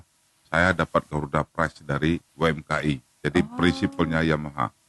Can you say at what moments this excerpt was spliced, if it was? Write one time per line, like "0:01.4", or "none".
0:02.3